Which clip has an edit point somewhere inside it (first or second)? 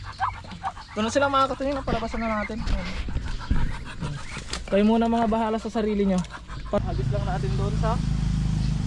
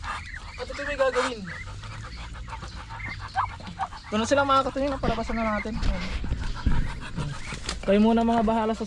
first